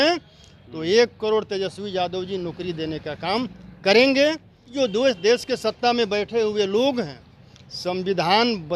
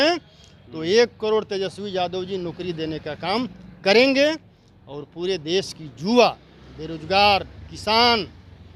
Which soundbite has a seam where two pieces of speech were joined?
first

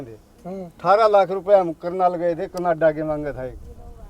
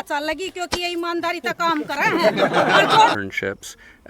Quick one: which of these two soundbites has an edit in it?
second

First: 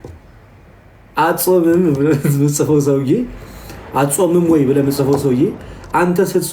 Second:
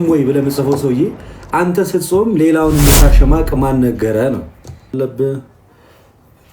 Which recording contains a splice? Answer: second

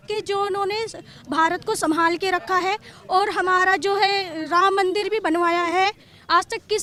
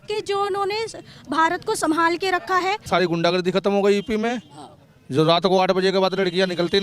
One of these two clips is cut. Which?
second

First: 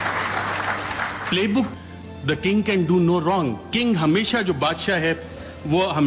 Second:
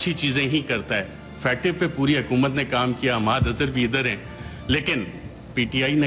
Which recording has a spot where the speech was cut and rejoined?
first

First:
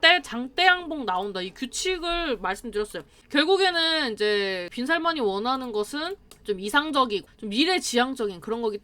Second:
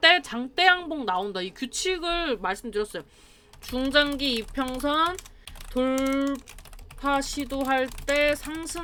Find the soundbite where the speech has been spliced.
first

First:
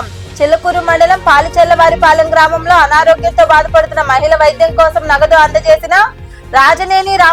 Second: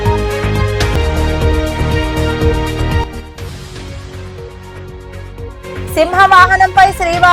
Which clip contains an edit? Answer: second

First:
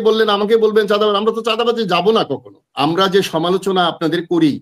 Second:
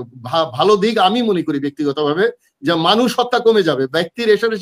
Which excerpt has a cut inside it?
first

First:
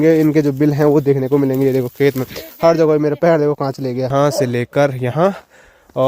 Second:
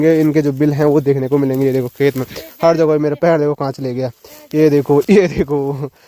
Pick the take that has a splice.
first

